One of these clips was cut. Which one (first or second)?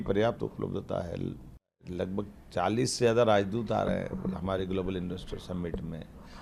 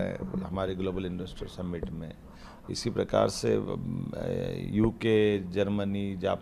first